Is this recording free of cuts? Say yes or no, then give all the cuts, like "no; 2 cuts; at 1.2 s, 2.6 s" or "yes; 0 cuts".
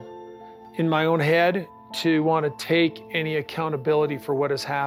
yes; 0 cuts